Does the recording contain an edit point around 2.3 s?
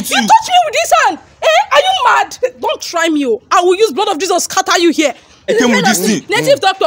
yes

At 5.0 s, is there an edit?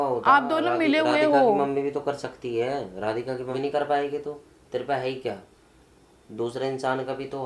no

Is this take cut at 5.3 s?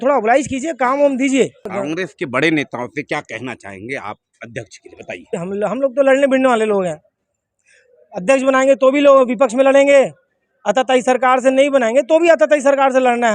yes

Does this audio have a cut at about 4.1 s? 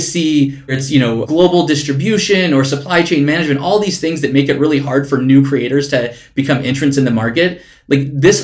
no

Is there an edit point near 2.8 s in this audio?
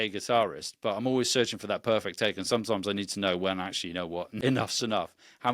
no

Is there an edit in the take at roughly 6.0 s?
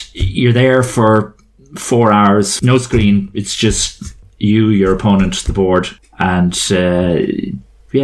yes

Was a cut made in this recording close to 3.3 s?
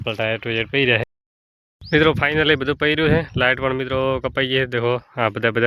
no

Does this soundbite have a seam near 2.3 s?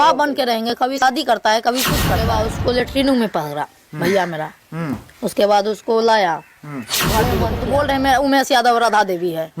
yes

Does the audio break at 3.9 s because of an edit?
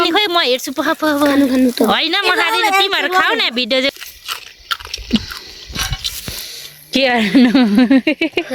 yes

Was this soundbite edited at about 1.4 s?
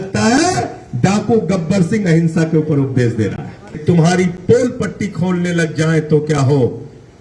no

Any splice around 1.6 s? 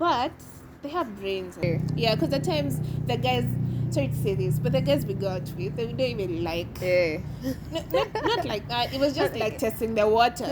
yes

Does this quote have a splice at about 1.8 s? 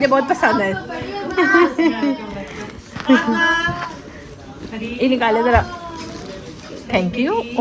no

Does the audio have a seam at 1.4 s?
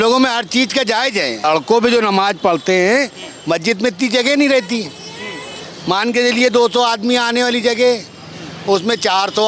yes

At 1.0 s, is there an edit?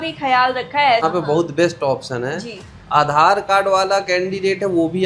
yes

